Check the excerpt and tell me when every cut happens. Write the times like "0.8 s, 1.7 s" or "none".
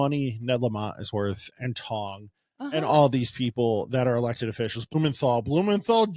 4.9 s

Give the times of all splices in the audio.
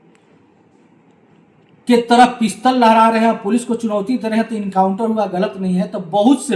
none

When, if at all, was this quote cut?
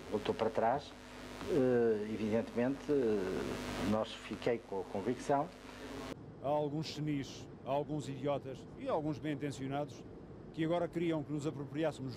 6.0 s

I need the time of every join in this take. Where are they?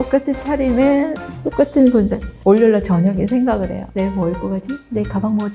none

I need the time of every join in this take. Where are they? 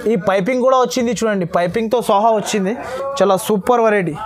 none

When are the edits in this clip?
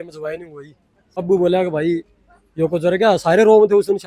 1.2 s

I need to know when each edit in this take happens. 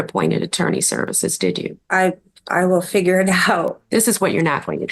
1.8 s, 3.8 s

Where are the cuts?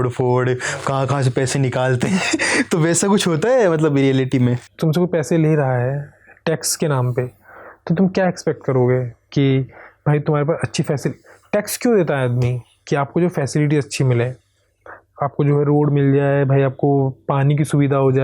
4.6 s

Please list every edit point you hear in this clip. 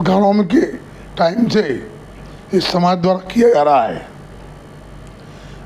none

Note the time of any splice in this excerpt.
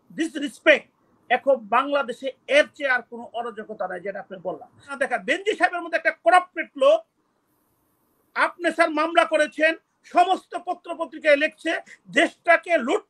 4.9 s

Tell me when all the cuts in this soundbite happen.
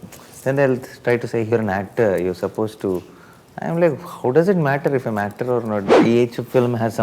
5.9 s

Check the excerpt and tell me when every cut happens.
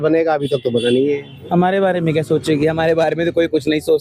1.3 s

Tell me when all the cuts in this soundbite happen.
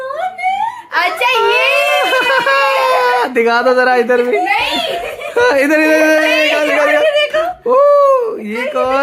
none

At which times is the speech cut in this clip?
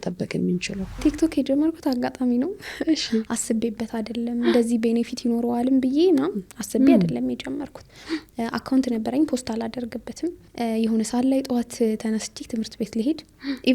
1.0 s, 10.4 s

